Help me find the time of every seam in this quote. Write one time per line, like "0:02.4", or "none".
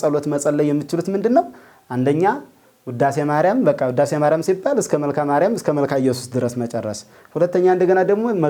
none